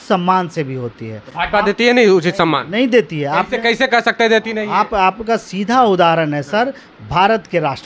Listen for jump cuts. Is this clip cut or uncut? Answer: uncut